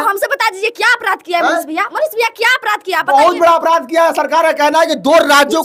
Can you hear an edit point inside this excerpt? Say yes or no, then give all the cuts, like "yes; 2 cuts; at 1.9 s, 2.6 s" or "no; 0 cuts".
no; 0 cuts